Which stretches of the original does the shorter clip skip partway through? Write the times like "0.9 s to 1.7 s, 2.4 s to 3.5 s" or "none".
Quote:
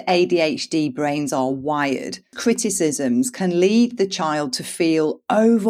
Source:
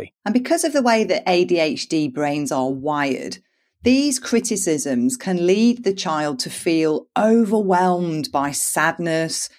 3.5 s to 4.2 s

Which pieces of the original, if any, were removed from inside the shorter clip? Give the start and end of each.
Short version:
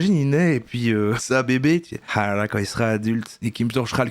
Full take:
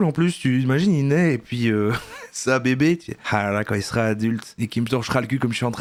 2.0 s to 2.4 s

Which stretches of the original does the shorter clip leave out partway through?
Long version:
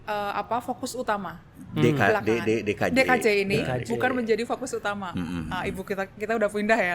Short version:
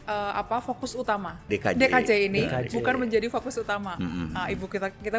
1.5 s to 2.6 s

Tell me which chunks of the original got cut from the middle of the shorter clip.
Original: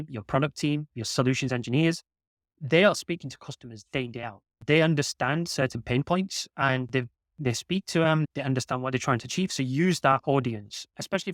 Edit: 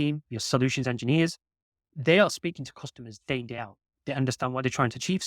4.6 s to 8.3 s

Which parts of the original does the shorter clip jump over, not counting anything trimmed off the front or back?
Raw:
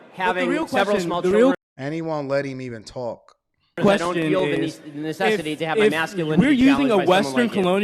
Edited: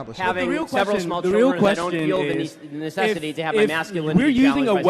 1.6 s to 3.8 s

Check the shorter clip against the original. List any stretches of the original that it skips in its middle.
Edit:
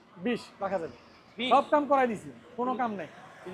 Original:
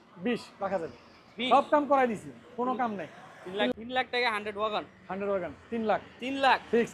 none

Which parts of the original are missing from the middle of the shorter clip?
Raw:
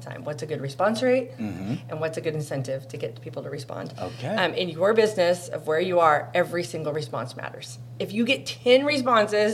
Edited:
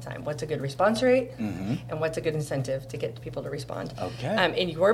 none

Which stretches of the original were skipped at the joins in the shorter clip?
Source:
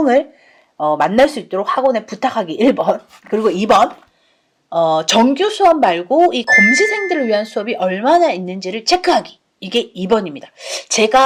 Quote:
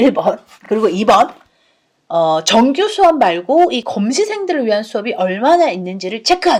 none

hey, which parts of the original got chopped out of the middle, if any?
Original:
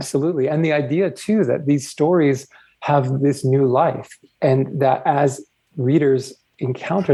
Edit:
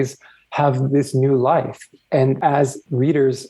4.8 s to 5.3 s

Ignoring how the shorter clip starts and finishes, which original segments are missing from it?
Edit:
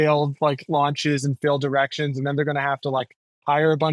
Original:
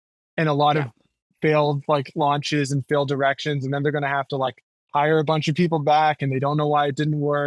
none

